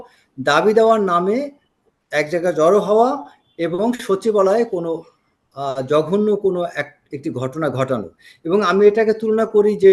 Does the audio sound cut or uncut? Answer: uncut